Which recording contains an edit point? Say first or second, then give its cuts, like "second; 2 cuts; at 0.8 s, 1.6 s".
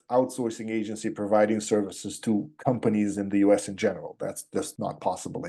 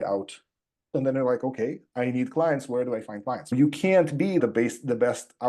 second; 3 cuts; at 1.0 s, 3.5 s, 4.4 s